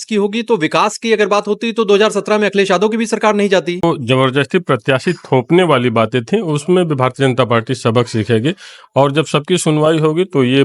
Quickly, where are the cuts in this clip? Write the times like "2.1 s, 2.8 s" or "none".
3.8 s